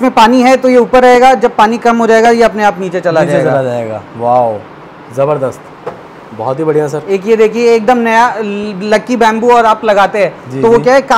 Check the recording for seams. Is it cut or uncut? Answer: uncut